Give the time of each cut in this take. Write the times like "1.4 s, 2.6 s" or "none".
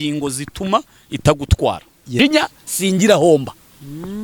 2.2 s